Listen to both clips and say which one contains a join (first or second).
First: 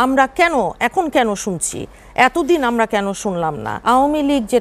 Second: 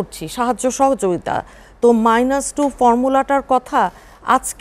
first